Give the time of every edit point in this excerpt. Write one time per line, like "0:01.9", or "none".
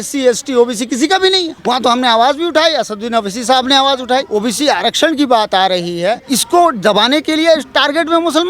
0:01.5
0:04.3
0:06.3